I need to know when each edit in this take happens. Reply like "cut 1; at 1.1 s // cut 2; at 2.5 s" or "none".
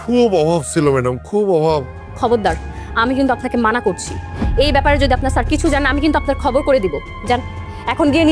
cut 1; at 2.0 s